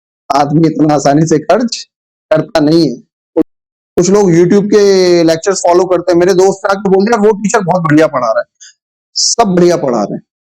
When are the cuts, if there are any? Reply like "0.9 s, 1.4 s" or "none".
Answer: 3.4 s